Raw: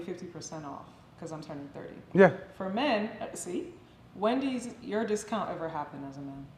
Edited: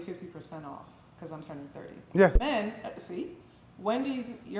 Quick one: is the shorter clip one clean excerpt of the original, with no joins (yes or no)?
no